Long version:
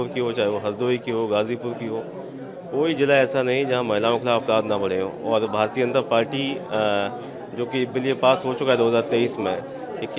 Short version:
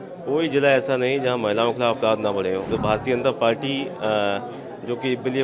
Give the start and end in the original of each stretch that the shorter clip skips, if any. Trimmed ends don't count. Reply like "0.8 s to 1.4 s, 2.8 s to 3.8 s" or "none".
5.2 s to 5.4 s